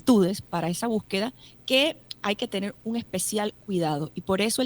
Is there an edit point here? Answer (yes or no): yes